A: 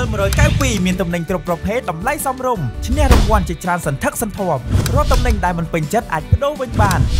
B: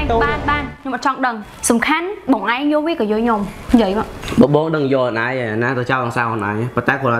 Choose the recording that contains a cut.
B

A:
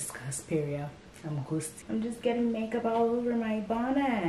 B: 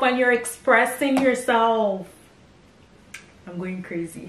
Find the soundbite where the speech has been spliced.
A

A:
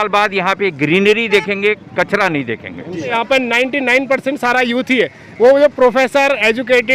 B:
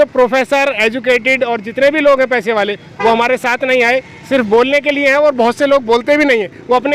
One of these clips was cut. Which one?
A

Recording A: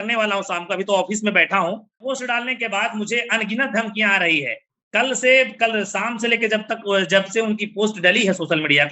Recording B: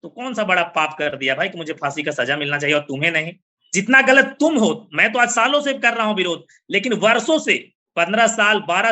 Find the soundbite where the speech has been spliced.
A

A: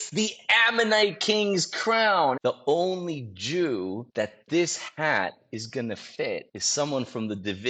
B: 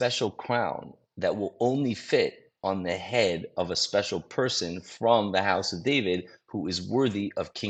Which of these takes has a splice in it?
A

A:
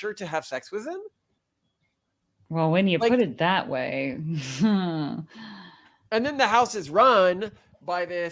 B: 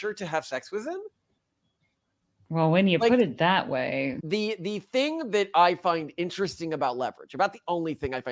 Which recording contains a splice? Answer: B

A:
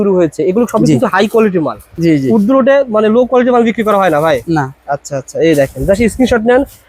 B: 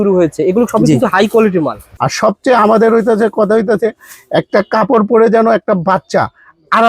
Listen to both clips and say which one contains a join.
B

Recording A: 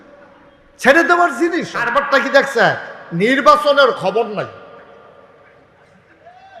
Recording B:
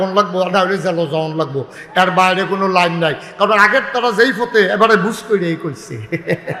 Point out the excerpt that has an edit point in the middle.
A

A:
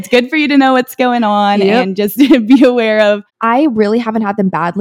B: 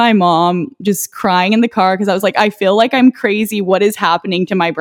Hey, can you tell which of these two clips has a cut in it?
A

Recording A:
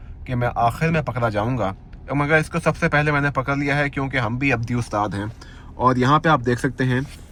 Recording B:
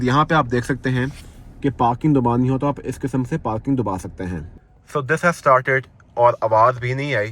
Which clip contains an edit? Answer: B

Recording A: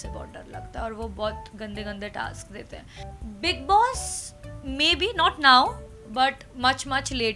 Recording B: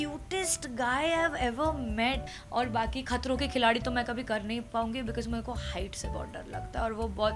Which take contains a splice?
B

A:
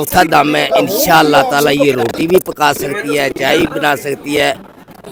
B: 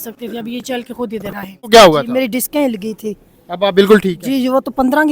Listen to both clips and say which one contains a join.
B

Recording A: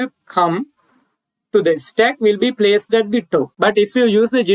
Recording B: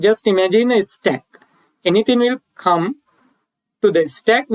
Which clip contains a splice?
A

